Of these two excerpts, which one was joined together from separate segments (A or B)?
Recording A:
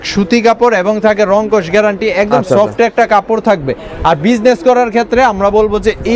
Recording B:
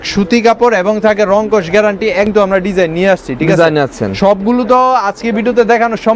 B